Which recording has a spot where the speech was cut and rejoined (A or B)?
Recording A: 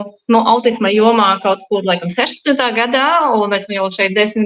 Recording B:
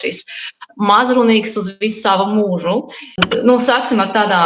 B